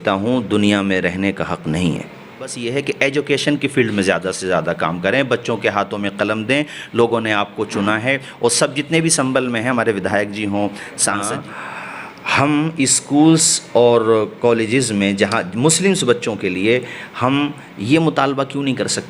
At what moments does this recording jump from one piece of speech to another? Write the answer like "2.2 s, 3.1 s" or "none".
2.6 s, 11.3 s